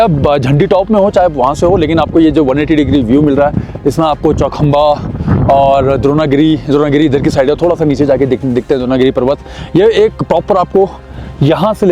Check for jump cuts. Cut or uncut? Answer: uncut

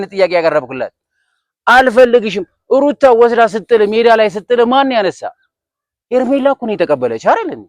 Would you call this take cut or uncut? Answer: uncut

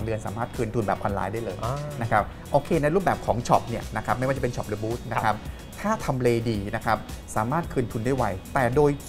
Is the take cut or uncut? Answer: uncut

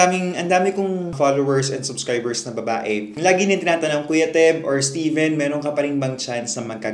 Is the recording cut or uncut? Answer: uncut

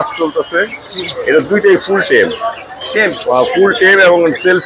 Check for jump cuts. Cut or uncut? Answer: uncut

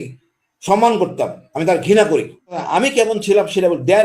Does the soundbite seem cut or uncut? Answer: cut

